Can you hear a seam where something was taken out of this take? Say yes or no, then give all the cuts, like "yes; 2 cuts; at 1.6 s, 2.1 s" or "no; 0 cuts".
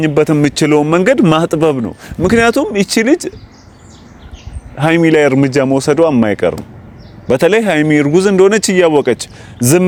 no; 0 cuts